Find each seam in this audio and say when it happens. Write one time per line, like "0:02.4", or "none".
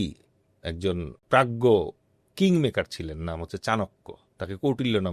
0:01.1

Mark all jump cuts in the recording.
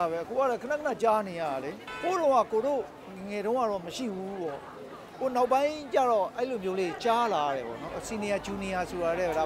0:01.8
0:08.0

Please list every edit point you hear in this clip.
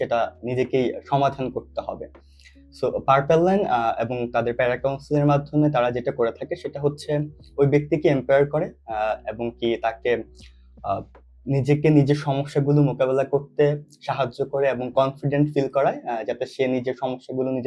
none

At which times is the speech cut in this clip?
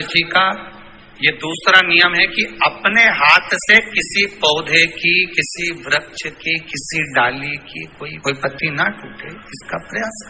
none

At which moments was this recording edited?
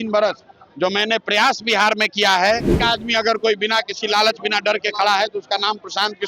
0:02.8

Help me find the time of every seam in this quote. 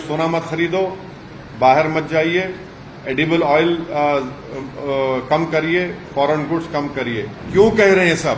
0:07.4

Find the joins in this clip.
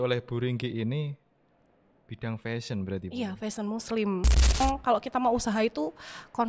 0:04.6

